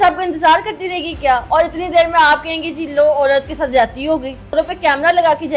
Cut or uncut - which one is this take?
cut